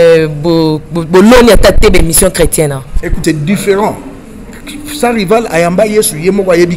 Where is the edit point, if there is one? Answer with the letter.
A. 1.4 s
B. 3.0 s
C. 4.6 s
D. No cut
B